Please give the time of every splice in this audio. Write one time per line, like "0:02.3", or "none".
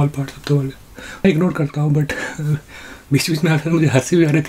0:01.2

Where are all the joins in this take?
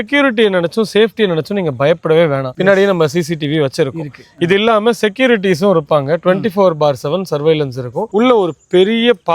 0:02.5
0:08.0

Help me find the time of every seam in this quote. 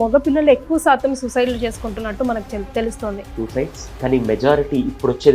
0:03.4

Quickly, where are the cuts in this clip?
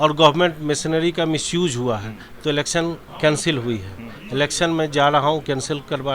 0:03.1

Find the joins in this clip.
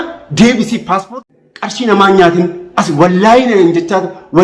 0:01.2

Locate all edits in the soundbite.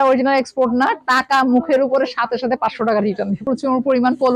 0:03.4

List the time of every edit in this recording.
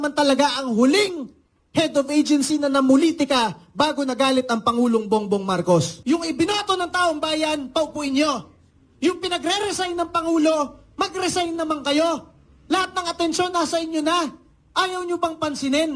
0:05.9

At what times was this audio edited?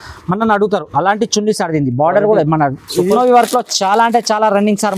0:03.2

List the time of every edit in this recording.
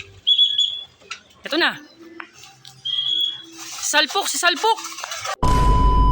0:01.5
0:05.2

